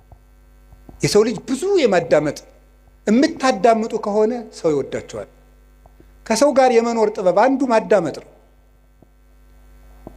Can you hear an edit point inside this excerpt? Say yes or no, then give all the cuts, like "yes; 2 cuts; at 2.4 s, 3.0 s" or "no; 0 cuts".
no; 0 cuts